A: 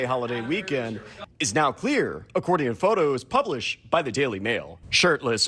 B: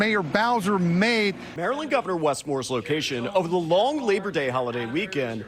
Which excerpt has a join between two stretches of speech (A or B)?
B